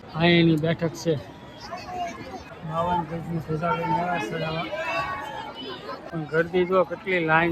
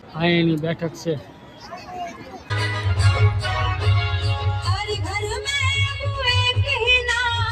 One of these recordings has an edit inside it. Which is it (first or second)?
first